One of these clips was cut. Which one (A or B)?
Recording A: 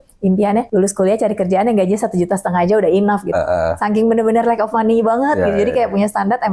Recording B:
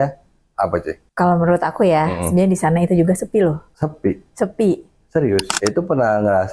B